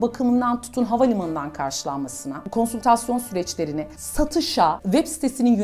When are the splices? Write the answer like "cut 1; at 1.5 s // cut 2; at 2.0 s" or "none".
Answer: cut 1; at 2.4 s